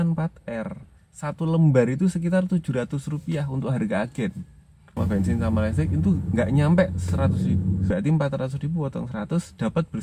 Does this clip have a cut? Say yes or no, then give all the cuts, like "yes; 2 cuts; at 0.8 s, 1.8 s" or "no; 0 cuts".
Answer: yes; 3 cuts; at 1.0 s, 5.0 s, 7.9 s